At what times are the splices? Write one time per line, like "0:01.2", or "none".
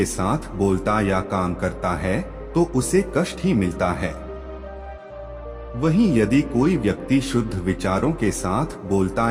none